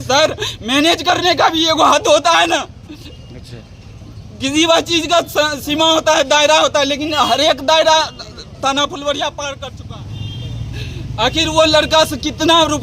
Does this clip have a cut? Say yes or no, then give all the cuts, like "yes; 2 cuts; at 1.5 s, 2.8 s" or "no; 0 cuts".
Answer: yes; 1 cut; at 9.7 s